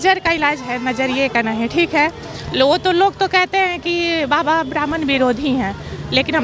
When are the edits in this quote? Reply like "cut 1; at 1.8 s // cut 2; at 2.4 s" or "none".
none